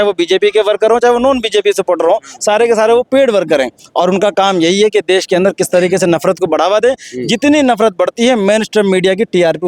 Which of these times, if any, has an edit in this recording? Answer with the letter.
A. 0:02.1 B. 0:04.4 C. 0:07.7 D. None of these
D